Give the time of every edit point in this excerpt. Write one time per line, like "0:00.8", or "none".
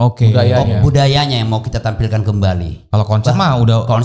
none

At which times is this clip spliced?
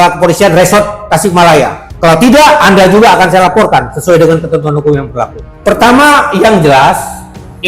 0:01.8
0:05.4

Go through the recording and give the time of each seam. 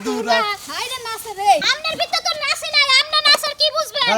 0:01.6

